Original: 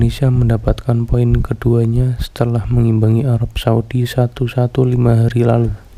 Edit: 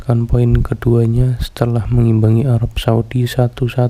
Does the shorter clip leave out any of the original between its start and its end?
no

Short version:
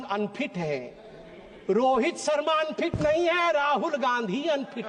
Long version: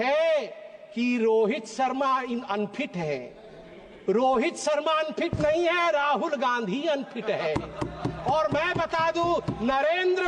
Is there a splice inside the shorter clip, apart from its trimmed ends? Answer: no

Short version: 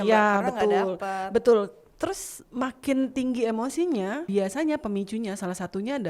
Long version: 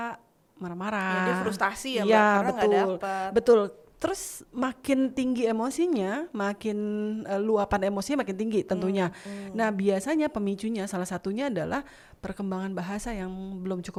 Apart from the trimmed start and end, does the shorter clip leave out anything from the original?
yes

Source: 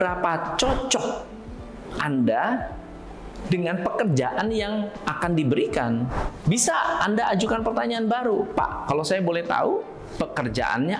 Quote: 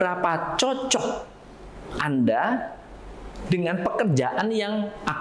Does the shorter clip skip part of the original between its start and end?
no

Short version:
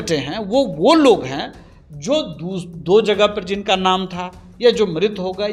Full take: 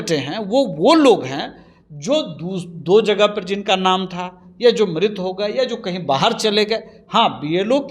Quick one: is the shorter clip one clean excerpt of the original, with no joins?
yes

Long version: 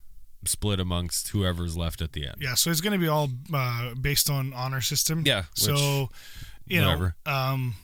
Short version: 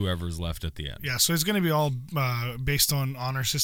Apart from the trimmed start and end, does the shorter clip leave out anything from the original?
no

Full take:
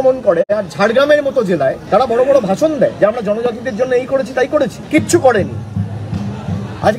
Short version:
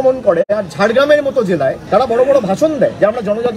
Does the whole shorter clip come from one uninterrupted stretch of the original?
yes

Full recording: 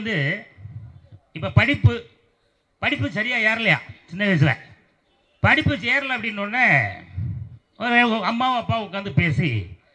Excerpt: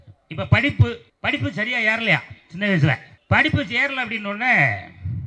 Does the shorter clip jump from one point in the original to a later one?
yes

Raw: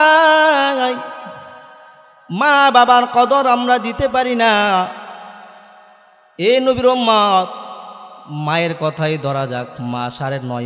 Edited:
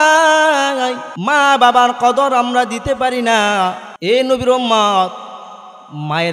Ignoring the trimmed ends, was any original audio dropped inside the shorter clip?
yes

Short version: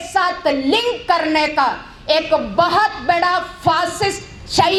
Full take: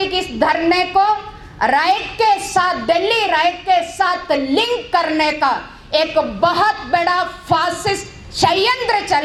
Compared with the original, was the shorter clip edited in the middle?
no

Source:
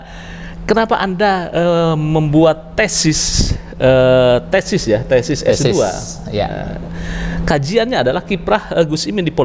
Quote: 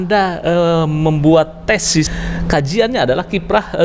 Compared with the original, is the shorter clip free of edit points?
no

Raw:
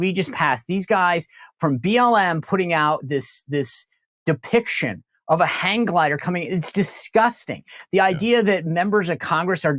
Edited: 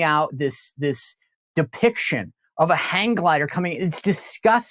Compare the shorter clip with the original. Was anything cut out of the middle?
no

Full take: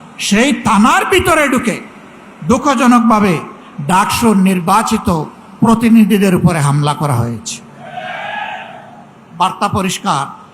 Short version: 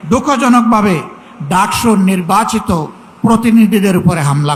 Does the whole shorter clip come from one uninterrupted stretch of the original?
yes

